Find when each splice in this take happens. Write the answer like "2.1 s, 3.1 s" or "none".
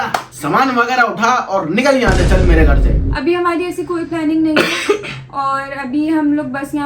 none